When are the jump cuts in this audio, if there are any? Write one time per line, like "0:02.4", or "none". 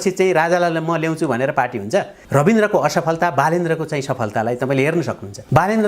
0:02.2